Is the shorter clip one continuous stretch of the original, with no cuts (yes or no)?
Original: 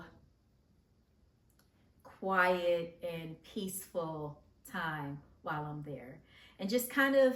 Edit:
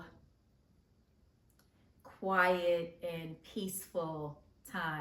yes